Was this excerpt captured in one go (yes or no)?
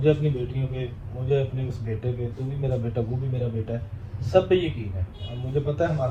yes